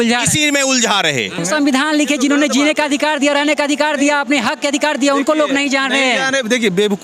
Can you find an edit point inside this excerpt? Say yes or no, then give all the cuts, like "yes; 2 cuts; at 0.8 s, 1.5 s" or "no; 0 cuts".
yes; 1 cut; at 1.4 s